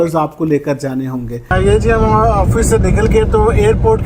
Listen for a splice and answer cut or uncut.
cut